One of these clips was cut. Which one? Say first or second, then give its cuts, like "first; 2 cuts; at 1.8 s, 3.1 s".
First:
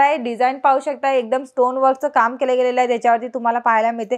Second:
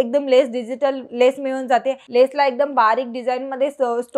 second; 1 cut; at 2.0 s